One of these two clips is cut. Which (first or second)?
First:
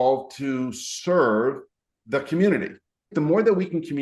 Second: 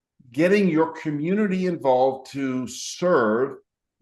first